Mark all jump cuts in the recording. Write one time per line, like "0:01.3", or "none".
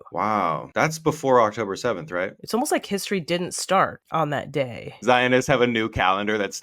0:02.4
0:04.9